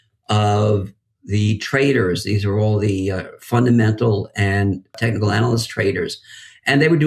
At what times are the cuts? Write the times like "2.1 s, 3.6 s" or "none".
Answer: 4.9 s

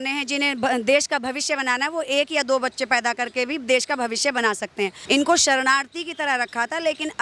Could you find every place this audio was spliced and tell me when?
5.0 s

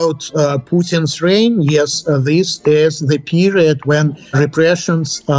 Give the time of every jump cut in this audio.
none

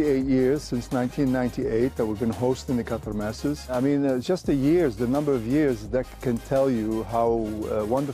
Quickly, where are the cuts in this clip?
none

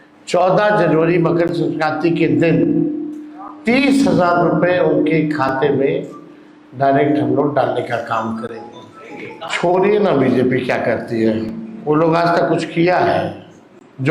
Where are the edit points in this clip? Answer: 9.4 s

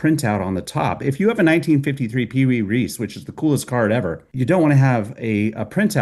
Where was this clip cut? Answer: 4.2 s

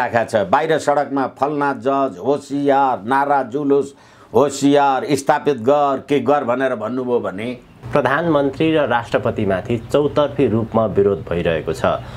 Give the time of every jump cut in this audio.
7.8 s, 9.0 s

